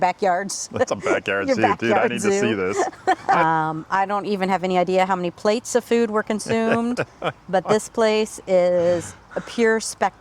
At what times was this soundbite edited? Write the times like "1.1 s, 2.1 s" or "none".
3.4 s